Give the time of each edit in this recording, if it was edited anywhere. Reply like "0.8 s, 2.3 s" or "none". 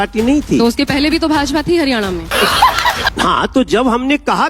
3.1 s